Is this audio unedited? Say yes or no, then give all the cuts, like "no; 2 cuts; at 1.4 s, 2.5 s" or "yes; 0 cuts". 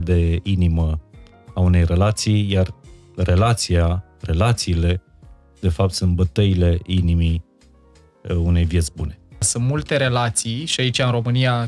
no; 1 cut; at 9.5 s